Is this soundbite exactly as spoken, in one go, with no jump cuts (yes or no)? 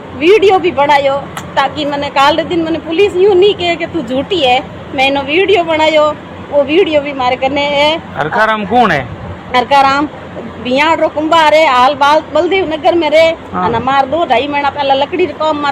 yes